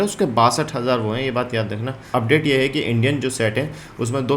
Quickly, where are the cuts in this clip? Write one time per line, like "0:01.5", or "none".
0:02.0

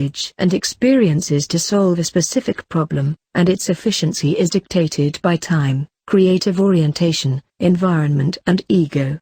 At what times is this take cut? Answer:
0:08.3

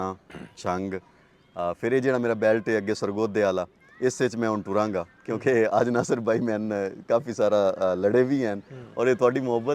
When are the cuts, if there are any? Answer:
none

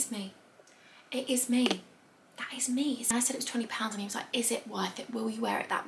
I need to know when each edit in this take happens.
0:03.0

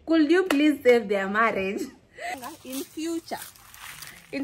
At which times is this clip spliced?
0:02.3

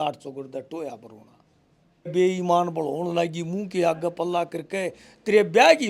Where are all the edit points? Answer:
0:02.1

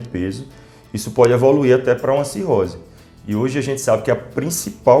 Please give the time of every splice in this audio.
none

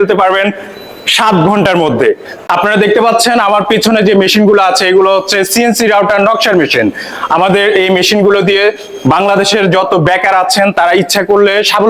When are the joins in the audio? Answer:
0:02.3

